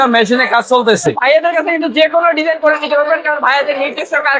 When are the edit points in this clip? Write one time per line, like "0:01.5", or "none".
0:01.1